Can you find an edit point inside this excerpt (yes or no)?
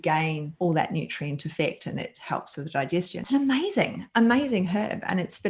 yes